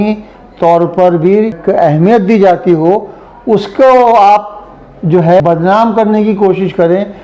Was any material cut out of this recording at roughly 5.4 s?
yes; 2 cuts; at 1.6 s, 5.4 s

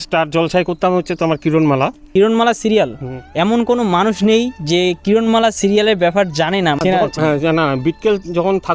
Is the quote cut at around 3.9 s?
no; 1 cut; at 2.0 s

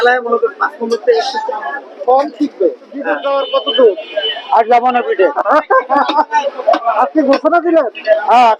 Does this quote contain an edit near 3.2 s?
yes; 1 cut; at 3.2 s

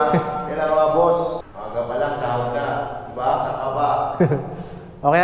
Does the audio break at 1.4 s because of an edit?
yes; 1 cut; at 1.4 s

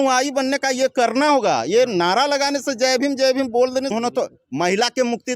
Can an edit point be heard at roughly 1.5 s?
no; 1 cut; at 3.9 s

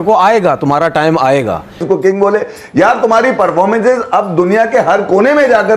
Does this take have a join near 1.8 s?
yes; 1 cut; at 1.8 s

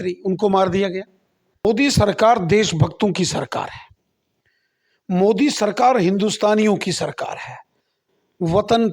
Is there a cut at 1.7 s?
yes; 1 cut; at 1.7 s

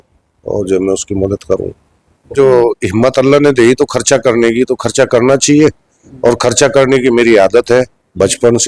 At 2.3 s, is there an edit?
yes; 1 cut; at 2.3 s

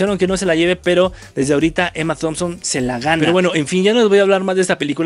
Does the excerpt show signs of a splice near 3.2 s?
no; 0 cuts

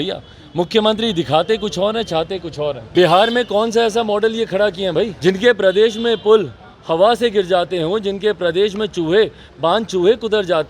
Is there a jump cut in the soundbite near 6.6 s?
no; 2 cuts; at 2.8 s, 5.1 s

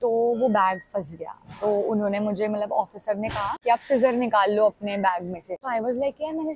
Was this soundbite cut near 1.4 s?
no; 2 cuts; at 3.5 s, 5.5 s

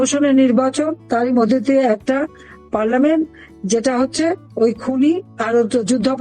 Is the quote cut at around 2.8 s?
no; 1 cut; at 1.0 s

